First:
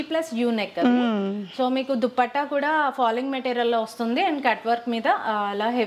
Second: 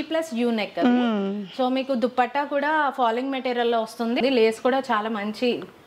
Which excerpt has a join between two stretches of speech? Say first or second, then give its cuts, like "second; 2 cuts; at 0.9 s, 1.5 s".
second; 1 cut; at 4.2 s